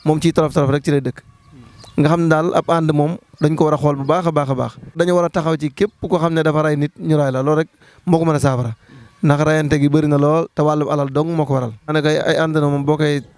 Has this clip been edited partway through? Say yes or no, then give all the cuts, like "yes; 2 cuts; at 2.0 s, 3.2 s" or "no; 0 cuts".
yes; 2 cuts; at 4.9 s, 11.9 s